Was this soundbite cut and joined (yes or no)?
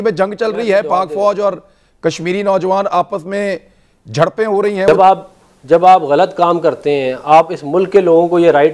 no